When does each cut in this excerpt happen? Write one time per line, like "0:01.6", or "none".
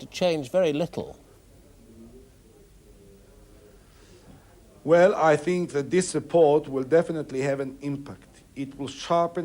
none